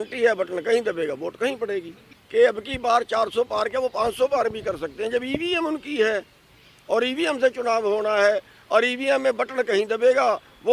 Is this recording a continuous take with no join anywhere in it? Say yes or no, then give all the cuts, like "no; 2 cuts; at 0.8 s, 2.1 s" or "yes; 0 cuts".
no; 1 cut; at 2.0 s